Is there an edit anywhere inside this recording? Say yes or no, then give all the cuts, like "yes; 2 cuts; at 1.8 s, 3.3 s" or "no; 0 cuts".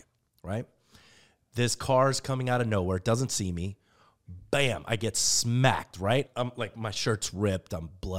yes; 1 cut; at 6.3 s